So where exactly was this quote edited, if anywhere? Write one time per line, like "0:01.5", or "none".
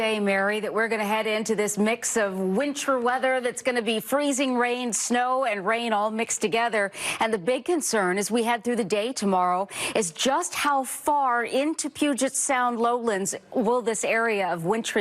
none